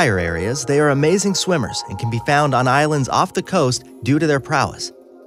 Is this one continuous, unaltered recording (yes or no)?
yes